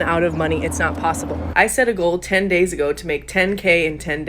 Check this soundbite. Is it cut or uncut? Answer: cut